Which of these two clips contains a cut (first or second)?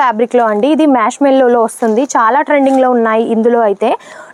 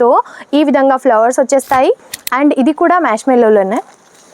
second